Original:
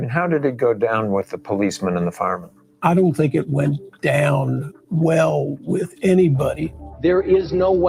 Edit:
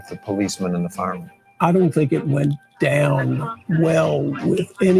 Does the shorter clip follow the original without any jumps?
yes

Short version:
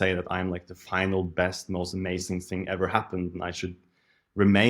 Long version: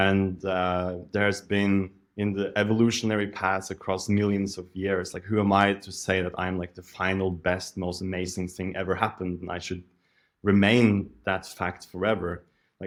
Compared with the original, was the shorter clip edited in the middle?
no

